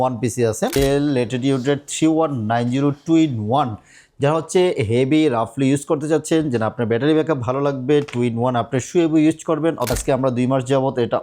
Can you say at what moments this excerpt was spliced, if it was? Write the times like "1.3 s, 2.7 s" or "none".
0.7 s, 9.9 s